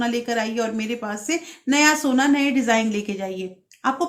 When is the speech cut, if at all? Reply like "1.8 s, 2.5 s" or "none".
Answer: none